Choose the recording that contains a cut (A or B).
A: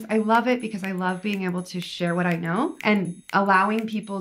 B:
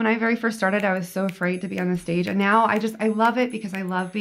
A